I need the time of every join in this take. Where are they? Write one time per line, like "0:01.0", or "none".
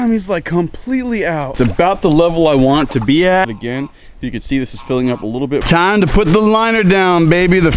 0:01.5
0:03.6
0:05.6